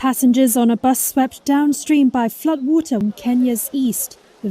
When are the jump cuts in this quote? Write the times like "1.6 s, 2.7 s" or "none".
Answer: 3.0 s